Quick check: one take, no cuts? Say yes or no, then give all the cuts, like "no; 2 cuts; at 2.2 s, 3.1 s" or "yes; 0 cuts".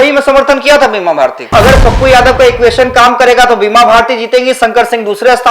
no; 1 cut; at 1.5 s